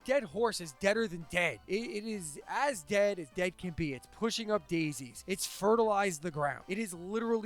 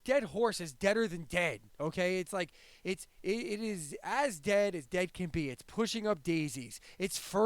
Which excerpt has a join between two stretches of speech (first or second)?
first